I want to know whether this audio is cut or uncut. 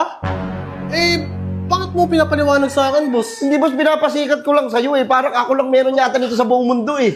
uncut